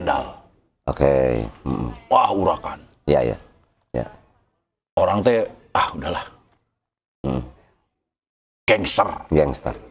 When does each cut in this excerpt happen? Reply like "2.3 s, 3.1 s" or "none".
none